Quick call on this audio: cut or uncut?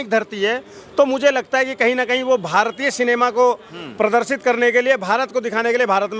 uncut